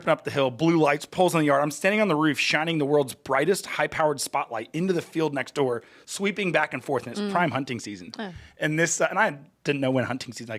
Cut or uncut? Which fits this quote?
uncut